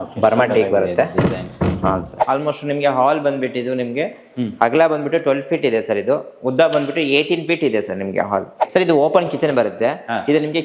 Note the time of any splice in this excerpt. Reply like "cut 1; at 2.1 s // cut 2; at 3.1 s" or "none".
cut 1; at 2.2 s // cut 2; at 8.6 s